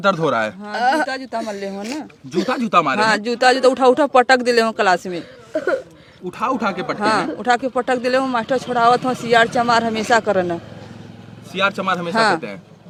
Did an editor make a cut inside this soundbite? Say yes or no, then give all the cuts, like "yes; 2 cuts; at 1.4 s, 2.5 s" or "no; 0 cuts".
no; 0 cuts